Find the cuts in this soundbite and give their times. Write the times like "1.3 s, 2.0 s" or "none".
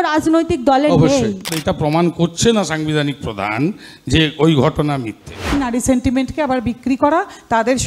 1.5 s, 5.6 s